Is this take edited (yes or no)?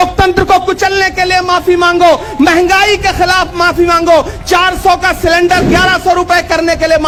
no